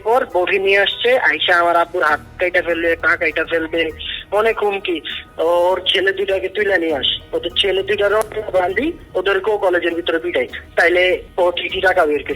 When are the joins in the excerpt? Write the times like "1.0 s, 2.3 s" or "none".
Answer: 5.2 s, 10.6 s, 11.3 s